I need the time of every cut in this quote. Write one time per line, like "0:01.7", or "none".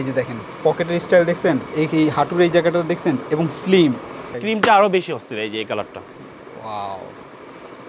0:04.4